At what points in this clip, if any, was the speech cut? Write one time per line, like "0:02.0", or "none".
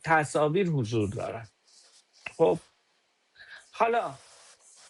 none